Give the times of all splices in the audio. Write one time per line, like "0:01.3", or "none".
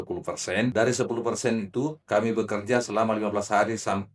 0:00.7
0:02.0